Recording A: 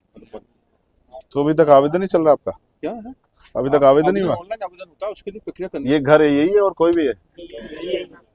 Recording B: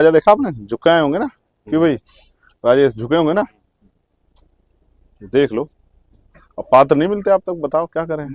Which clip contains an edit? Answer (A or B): A